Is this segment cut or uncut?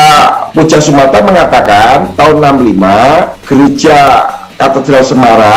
uncut